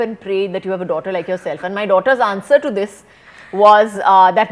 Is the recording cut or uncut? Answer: uncut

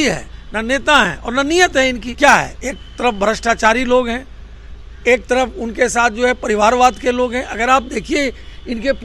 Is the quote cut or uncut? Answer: cut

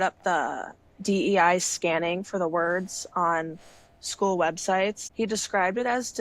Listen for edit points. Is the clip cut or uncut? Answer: uncut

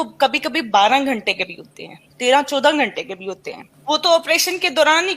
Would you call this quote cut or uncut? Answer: cut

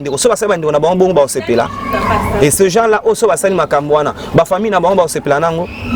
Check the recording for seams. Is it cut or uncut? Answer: uncut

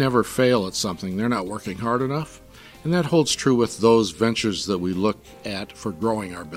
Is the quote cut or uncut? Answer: cut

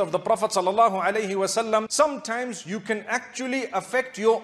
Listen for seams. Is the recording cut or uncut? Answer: cut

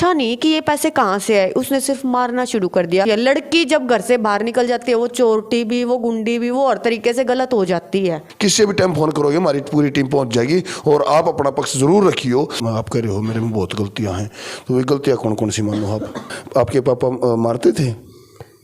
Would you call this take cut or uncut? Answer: cut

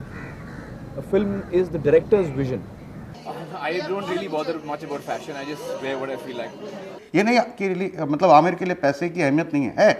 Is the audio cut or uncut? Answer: cut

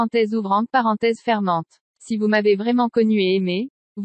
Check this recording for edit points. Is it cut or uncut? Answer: cut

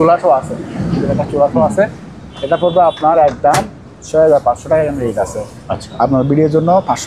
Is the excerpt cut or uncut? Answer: uncut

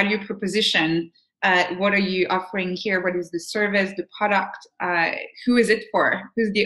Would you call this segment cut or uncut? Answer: uncut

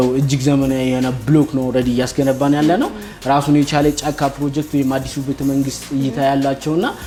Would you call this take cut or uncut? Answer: uncut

